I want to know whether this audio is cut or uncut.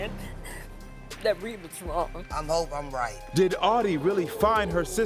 cut